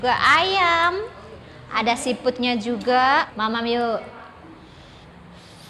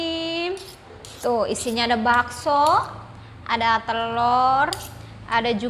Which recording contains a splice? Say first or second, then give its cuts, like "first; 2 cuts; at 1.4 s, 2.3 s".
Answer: first; 1 cut; at 3.3 s